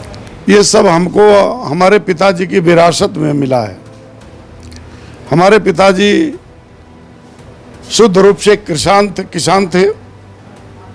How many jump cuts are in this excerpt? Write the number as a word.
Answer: zero